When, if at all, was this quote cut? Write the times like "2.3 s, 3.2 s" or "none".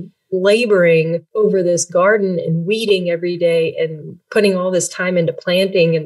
1.3 s

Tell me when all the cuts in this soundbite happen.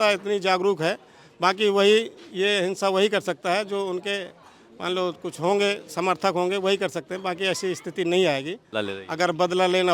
8.6 s

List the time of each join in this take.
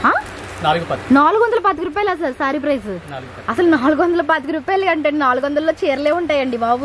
none

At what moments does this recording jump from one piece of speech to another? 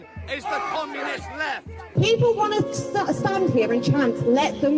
1.8 s

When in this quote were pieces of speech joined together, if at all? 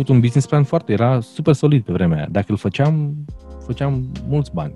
none

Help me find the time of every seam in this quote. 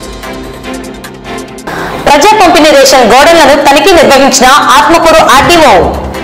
1.3 s

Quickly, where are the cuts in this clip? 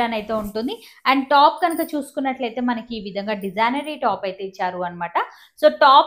none

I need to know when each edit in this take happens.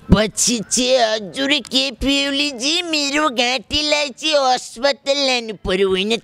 none

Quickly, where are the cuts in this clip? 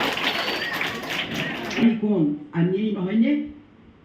1.8 s

